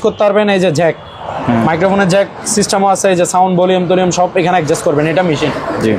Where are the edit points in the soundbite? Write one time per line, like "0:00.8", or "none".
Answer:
none